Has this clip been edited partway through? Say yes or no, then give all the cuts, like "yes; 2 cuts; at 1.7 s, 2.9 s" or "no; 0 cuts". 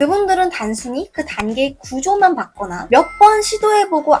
no; 0 cuts